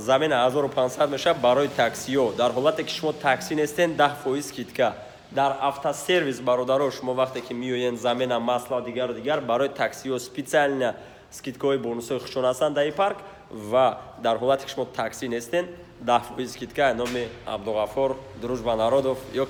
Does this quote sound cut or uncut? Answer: uncut